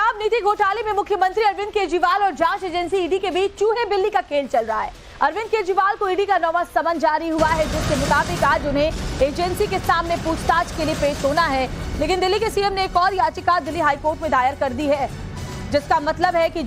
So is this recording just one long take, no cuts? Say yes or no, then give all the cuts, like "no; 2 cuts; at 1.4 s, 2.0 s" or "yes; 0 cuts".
no; 1 cut; at 0.9 s